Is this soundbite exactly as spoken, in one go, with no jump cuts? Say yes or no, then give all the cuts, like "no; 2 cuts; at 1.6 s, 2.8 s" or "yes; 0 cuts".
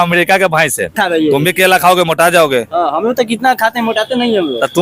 no; 1 cut; at 1.0 s